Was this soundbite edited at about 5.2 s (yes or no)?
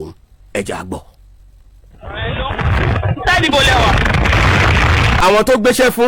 yes